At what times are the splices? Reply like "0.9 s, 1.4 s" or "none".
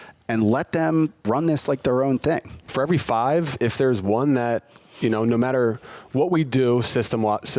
1.2 s, 2.6 s